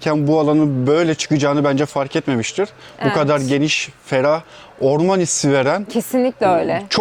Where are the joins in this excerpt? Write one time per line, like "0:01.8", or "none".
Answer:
none